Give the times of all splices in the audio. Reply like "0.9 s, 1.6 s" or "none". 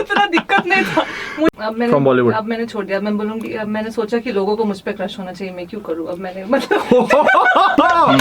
1.5 s